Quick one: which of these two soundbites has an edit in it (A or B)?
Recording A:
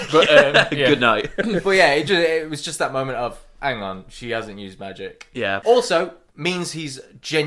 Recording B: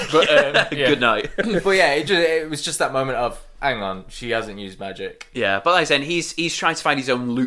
A